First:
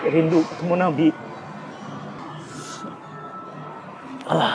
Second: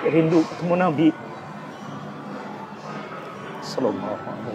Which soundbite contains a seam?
first; 1 cut; at 2.2 s

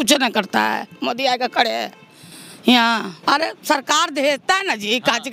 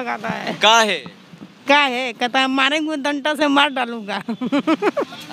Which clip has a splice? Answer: first; 1 cut; at 3.1 s

